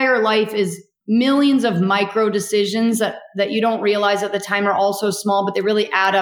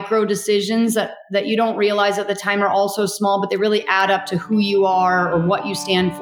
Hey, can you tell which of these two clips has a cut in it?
first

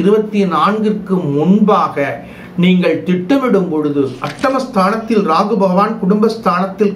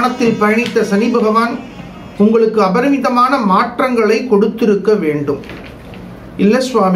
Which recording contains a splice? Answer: first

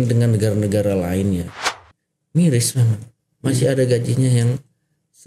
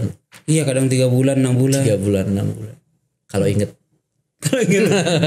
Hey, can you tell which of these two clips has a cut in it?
first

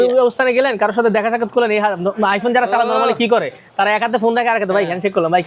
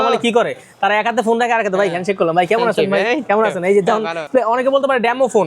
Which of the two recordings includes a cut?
second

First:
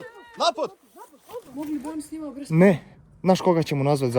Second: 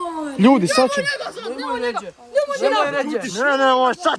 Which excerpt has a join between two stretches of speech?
first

